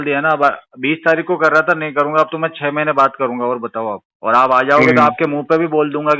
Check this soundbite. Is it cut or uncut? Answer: cut